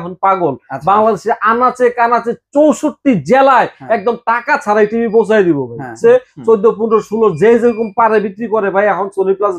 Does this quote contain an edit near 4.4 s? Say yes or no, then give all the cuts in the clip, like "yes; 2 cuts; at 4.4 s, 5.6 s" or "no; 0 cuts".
no; 1 cut; at 5.9 s